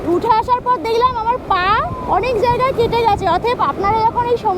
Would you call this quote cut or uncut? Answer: uncut